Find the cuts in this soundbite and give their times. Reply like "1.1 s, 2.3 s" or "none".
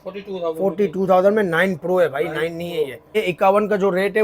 3.0 s